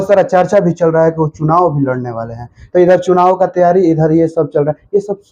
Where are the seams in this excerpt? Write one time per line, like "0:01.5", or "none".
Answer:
none